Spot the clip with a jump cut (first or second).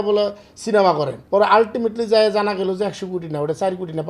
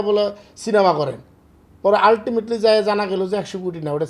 first